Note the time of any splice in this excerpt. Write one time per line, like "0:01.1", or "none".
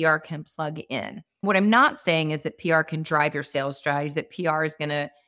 0:01.4